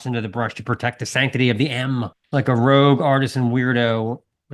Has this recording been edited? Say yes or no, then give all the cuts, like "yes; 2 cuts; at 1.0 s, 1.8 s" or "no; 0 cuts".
yes; 1 cut; at 2.2 s